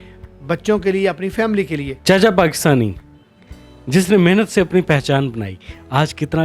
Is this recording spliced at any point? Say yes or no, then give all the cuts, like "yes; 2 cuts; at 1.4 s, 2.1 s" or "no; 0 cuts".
yes; 1 cut; at 1.9 s